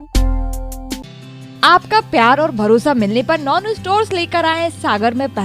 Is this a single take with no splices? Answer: yes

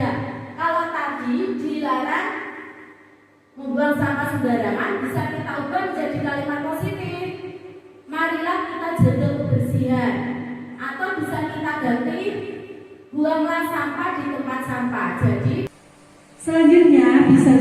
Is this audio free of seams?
no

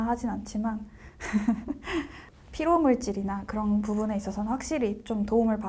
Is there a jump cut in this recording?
yes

